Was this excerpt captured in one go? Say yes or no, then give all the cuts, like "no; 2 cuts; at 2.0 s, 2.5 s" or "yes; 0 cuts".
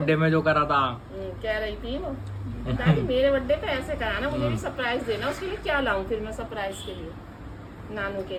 yes; 0 cuts